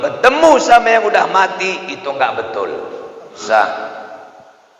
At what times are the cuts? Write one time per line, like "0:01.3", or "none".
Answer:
0:03.3